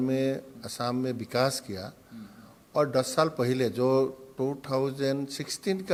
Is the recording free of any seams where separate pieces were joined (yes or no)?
yes